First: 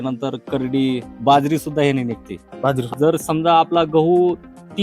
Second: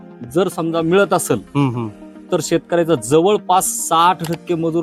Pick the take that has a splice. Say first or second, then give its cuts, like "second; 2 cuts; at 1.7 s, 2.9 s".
first; 1 cut; at 2.9 s